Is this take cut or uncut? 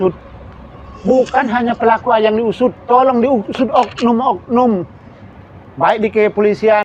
uncut